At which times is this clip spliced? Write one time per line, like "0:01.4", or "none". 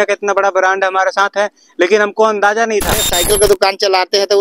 0:03.1